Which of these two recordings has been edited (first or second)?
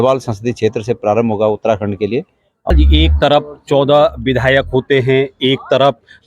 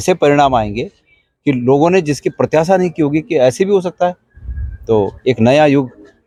first